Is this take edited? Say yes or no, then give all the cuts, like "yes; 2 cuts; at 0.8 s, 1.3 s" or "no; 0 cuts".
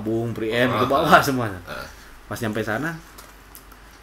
no; 0 cuts